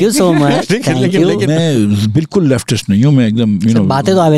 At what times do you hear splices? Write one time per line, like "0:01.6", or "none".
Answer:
0:01.4